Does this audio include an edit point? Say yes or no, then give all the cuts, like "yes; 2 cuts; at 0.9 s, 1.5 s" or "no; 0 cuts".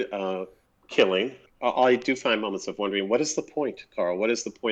yes; 1 cut; at 1.4 s